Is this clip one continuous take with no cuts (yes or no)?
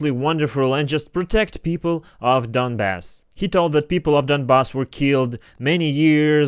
yes